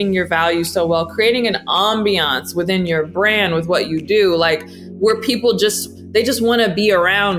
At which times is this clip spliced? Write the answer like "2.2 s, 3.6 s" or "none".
none